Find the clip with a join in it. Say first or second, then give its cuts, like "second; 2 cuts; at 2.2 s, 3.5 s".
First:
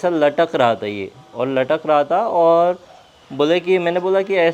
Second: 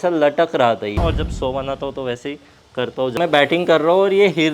second; 2 cuts; at 1.0 s, 3.2 s